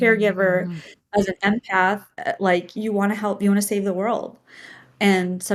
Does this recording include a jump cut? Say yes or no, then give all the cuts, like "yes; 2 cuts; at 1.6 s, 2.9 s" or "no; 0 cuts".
no; 0 cuts